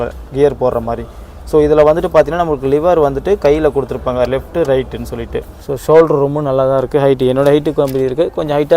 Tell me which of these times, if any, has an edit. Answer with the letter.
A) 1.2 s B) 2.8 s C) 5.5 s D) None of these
C